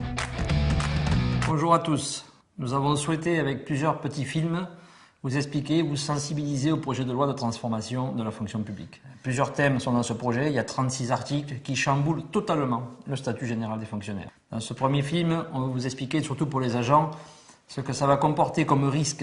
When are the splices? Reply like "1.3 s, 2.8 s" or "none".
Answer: 1.3 s